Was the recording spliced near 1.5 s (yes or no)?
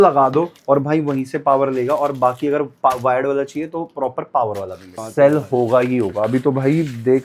no